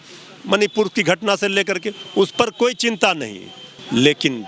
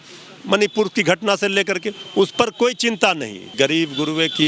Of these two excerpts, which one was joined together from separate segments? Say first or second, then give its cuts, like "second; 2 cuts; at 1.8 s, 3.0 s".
second; 1 cut; at 3.5 s